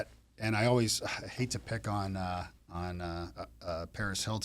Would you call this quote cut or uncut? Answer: uncut